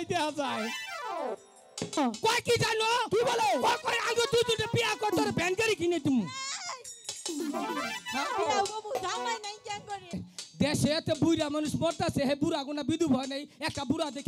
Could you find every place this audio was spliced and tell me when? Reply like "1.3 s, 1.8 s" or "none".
2.0 s, 10.3 s